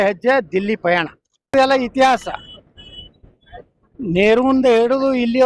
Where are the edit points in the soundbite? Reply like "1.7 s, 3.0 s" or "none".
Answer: 1.5 s